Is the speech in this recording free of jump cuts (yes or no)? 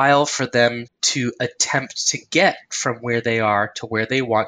no